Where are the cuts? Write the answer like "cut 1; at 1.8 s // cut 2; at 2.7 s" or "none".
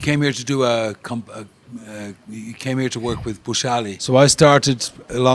cut 1; at 3.9 s

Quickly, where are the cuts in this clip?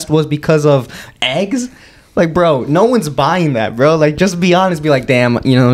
none

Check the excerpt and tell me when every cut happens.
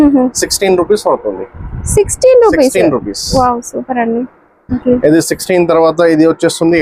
none

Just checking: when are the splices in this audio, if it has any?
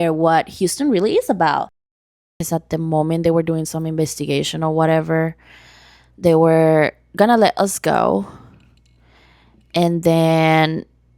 cut 1; at 2.1 s

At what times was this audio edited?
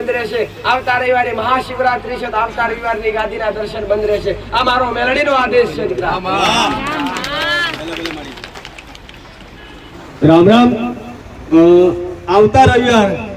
cut 1; at 9.9 s

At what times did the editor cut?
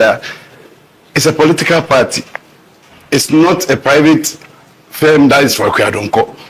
none

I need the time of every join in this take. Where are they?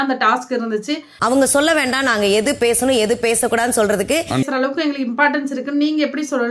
cut 1; at 1.1 s // cut 2; at 4.5 s

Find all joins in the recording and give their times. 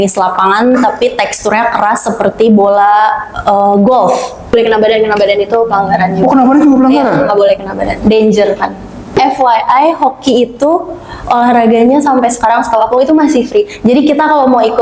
cut 1; at 4.5 s // cut 2; at 9.2 s

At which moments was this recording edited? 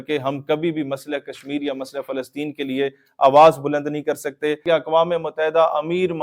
cut 1; at 4.6 s

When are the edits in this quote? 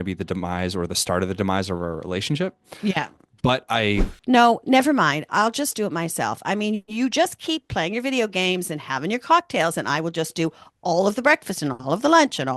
cut 1; at 4.1 s

